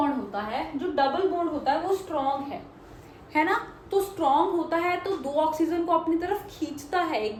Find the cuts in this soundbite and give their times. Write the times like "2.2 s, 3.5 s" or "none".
none

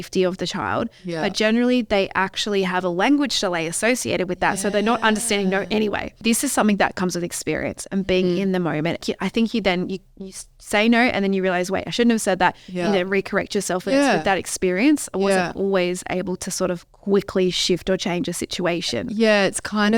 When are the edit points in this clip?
6.2 s, 9.0 s

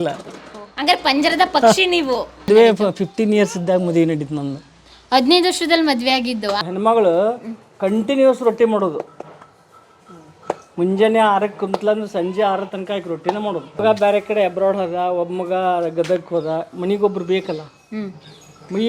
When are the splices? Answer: 2.5 s, 6.6 s, 13.8 s

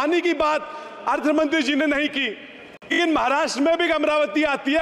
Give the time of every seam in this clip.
2.9 s

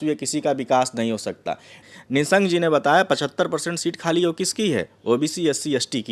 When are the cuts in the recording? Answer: 1.8 s

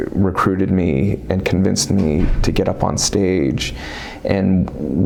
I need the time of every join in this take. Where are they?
none

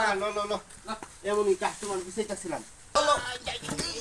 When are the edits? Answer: 3.0 s

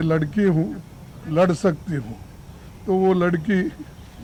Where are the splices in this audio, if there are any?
none

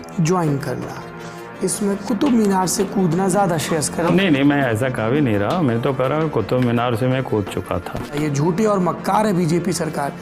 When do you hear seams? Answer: 4.1 s, 8.1 s

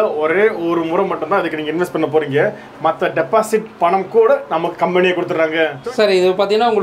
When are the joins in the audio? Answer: 5.8 s

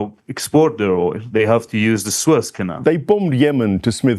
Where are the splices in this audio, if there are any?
2.7 s

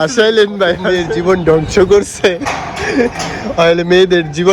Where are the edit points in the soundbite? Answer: 1.1 s

